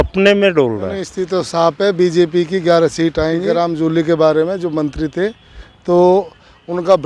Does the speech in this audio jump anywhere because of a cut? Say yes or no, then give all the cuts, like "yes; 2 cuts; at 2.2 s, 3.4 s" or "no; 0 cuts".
yes; 2 cuts; at 1.1 s, 3.4 s